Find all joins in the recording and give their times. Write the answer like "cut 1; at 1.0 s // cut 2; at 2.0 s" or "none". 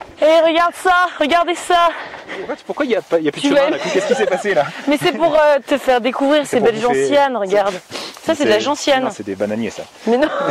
cut 1; at 2.6 s